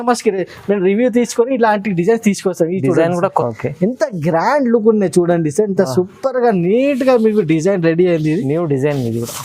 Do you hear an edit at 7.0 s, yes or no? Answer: no